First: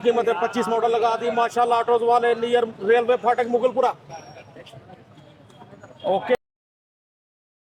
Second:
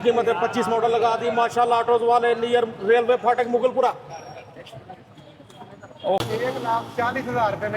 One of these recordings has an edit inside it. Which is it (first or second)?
second